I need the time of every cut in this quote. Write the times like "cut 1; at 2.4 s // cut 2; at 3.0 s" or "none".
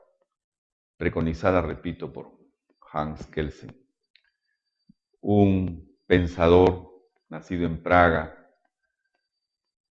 cut 1; at 5.5 s